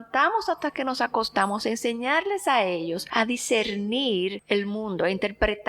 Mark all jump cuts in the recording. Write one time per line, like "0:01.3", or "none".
0:03.0
0:04.4